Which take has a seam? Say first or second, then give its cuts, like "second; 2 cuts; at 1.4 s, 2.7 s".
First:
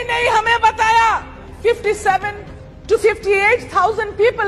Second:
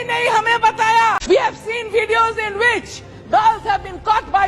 second; 1 cut; at 1.2 s